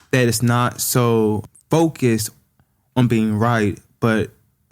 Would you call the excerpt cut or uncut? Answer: cut